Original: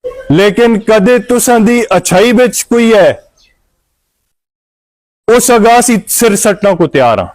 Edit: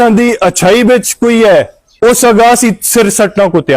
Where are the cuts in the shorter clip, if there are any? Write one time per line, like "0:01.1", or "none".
0:01.8